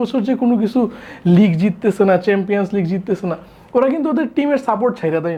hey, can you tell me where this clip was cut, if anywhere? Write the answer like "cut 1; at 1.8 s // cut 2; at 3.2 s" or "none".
none